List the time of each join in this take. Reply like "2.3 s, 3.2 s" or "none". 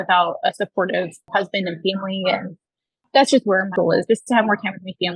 1.2 s, 3.1 s, 3.7 s